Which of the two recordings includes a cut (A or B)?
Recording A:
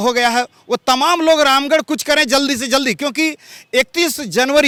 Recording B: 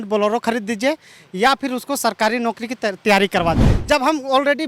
B